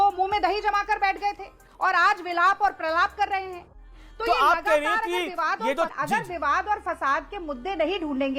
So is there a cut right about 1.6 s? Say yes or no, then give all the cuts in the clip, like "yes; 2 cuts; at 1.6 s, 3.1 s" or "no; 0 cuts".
no; 0 cuts